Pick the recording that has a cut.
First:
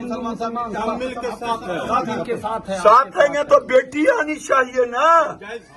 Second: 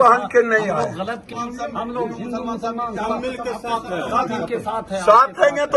second; 1 cut; at 1.3 s

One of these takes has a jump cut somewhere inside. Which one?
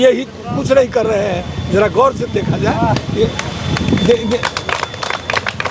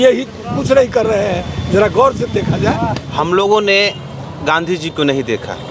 second; 1 cut; at 3.0 s

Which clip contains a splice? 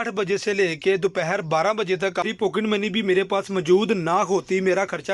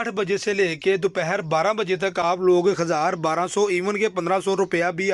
first; 1 cut; at 2.2 s

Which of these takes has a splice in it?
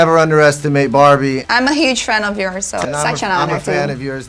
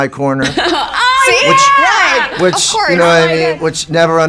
first; 2 cuts; at 1.4 s, 2.8 s

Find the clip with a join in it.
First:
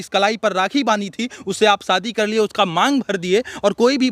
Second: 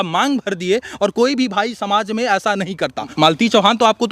second; 1 cut; at 3.1 s

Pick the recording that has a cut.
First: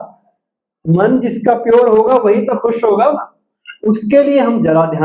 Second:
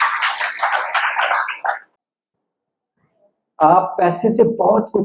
second; 1 cut; at 1.9 s

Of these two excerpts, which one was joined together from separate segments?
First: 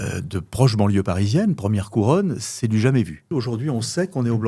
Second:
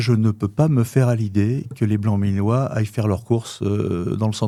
first; 1 cut; at 3.3 s

